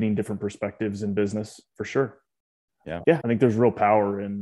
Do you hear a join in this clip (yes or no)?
yes